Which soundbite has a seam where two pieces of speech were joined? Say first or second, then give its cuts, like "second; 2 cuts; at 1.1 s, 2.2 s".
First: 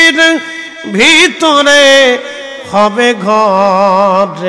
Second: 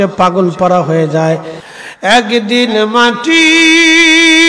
second; 1 cut; at 1.6 s